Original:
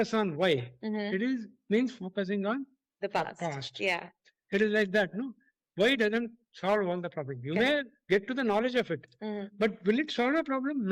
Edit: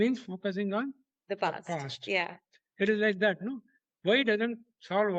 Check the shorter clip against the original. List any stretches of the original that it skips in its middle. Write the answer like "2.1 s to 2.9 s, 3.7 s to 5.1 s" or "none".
none